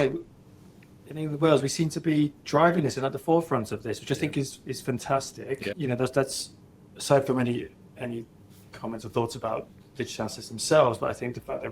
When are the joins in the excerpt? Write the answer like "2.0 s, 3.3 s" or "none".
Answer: 5.7 s